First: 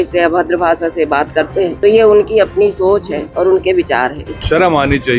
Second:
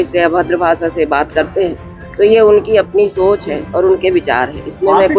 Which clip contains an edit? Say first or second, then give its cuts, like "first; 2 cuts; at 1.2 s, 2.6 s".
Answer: first; 2 cuts; at 1.8 s, 4.3 s